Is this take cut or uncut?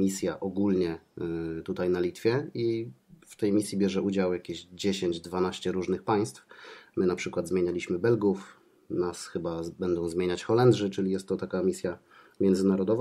uncut